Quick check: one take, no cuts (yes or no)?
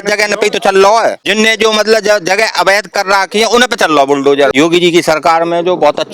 no